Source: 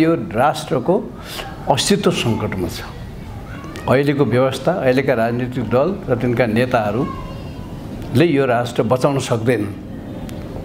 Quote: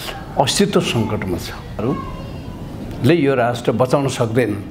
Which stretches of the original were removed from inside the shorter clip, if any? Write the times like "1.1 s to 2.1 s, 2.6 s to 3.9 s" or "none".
3.1 s to 6.9 s